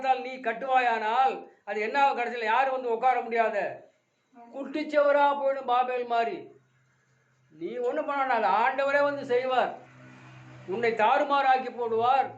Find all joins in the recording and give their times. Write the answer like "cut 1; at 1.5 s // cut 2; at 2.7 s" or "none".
none